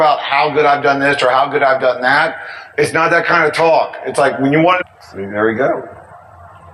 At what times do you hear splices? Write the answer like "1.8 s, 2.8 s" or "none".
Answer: none